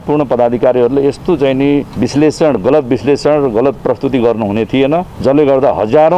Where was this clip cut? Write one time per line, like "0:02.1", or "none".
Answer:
0:01.9
0:05.1